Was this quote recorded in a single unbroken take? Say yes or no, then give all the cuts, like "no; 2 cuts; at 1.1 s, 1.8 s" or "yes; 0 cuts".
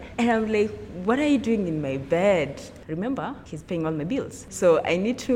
no; 3 cuts; at 2.7 s, 3.5 s, 4.4 s